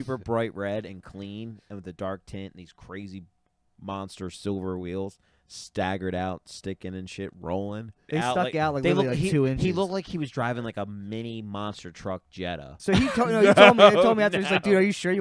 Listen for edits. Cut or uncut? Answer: cut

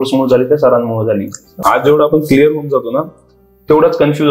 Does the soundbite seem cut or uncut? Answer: cut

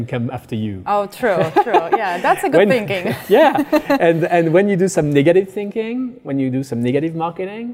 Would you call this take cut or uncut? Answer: uncut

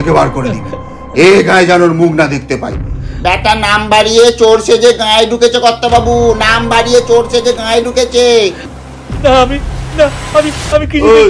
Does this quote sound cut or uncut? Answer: cut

